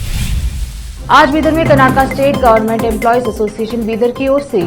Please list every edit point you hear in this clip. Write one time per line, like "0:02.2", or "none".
0:00.9